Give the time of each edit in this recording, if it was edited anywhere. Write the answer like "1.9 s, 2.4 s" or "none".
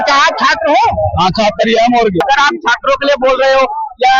2.2 s

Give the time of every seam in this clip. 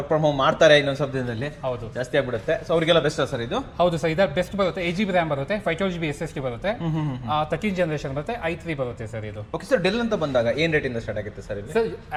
none

